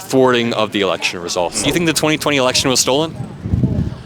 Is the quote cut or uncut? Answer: cut